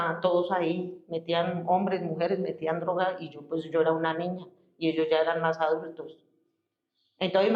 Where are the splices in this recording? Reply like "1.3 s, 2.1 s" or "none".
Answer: none

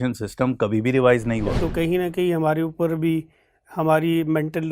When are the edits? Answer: 1.5 s

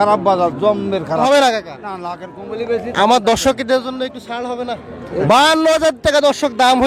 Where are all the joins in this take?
1.2 s, 5.2 s

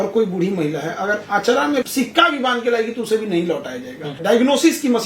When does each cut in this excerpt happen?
1.8 s, 4.2 s

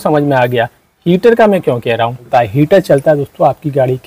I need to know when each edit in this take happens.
2.2 s

